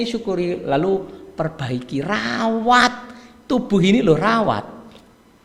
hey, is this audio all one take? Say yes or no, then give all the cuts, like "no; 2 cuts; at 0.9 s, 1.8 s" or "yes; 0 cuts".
yes; 0 cuts